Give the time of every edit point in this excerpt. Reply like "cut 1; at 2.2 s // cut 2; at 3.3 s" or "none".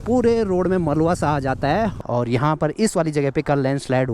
cut 1; at 2.0 s